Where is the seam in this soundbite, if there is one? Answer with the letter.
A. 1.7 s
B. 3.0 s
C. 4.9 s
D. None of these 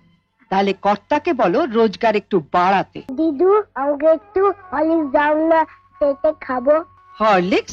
B